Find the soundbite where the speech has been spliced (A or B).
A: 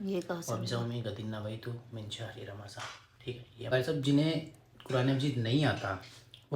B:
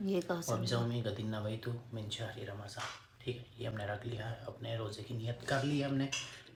A